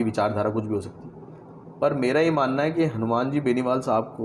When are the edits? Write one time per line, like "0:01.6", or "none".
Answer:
none

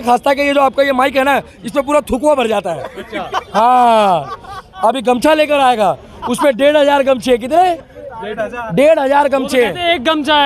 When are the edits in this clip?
none

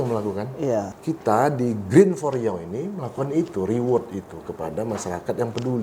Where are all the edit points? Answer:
0:01.0

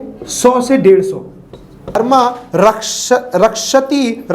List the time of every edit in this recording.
0:02.0

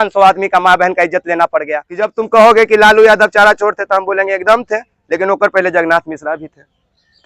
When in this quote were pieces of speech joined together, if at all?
0:02.1

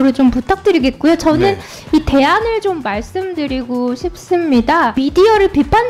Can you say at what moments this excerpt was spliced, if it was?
0:04.9

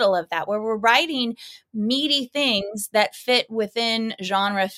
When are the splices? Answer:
none

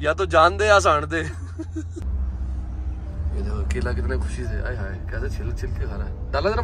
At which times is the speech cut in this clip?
0:02.1

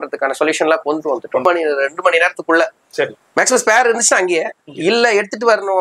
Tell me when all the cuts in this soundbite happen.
0:01.4

